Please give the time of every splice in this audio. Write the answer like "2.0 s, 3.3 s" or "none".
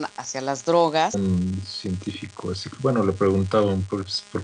none